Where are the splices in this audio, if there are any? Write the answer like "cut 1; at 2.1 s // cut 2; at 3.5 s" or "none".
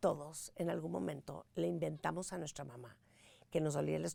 none